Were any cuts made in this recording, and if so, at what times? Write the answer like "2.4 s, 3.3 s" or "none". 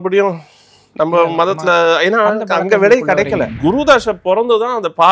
3.5 s